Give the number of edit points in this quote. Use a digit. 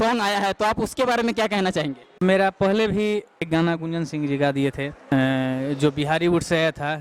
3